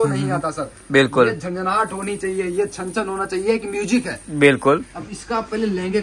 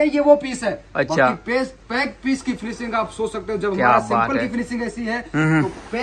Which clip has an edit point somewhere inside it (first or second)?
first